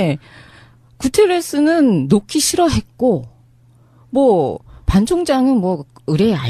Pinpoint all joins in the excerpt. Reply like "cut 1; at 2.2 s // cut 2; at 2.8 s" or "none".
cut 1; at 1.7 s